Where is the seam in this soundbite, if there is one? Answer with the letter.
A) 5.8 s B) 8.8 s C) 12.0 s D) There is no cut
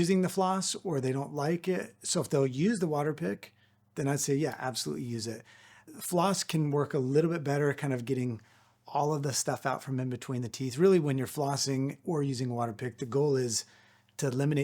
A